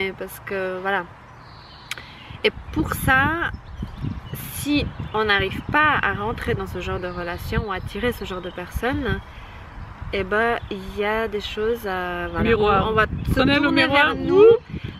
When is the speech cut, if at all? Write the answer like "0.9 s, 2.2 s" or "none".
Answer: none